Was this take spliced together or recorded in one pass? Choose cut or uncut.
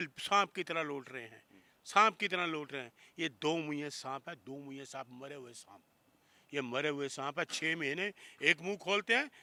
uncut